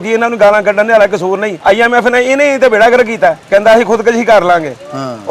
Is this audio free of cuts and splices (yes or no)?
no